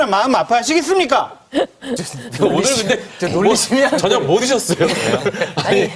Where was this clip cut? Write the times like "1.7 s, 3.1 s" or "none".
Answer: none